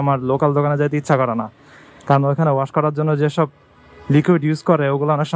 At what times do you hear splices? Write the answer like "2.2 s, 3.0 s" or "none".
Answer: none